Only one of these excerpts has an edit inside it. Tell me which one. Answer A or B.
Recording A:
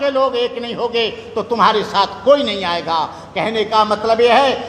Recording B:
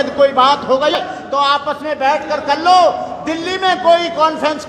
B